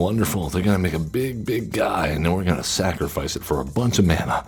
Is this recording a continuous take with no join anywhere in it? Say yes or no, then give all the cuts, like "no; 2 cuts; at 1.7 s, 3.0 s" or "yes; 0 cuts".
yes; 0 cuts